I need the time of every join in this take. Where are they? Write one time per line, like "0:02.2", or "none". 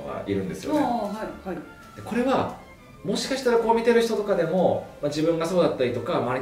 none